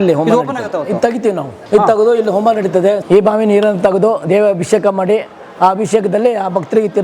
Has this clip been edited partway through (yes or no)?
yes